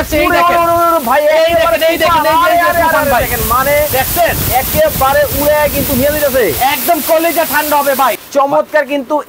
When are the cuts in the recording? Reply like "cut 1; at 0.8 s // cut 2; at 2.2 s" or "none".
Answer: cut 1; at 8.2 s